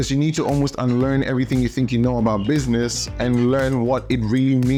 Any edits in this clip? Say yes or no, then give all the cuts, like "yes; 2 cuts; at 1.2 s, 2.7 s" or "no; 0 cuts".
no; 0 cuts